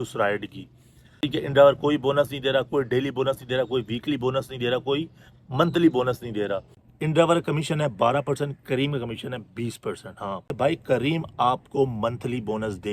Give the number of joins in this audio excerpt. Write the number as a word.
three